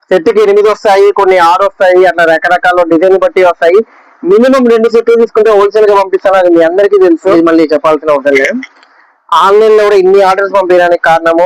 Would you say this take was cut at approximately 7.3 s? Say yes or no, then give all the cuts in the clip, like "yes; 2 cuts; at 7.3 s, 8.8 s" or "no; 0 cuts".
yes; 1 cut; at 7.3 s